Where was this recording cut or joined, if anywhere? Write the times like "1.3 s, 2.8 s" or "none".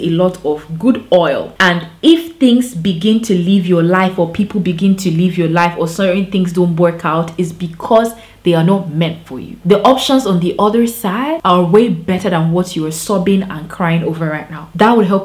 none